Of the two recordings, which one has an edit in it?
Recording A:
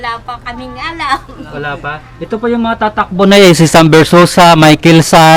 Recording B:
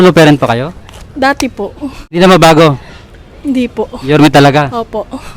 B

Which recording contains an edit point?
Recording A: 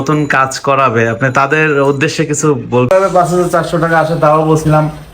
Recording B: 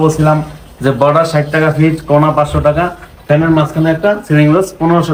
A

